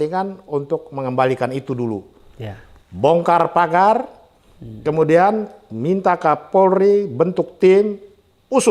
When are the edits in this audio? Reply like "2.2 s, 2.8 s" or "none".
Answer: none